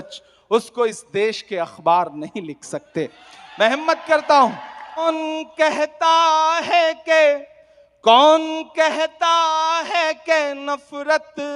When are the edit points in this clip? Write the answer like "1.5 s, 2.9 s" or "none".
5.1 s